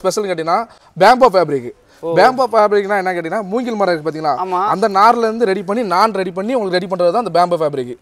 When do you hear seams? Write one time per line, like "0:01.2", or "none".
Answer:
none